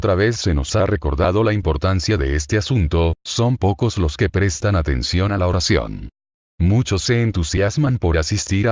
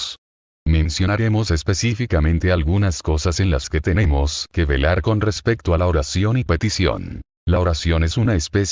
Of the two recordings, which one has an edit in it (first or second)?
first